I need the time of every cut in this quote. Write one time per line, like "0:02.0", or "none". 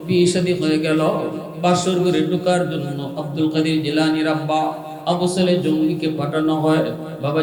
none